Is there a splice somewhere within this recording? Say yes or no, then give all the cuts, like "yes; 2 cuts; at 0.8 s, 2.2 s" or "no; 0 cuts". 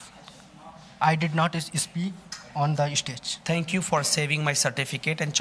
no; 0 cuts